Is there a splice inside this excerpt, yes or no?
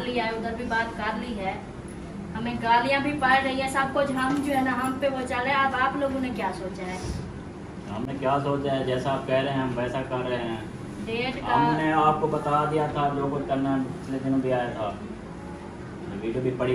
no